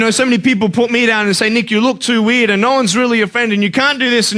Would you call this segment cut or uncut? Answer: uncut